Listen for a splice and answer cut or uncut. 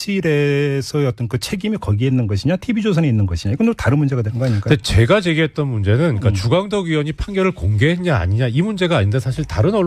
cut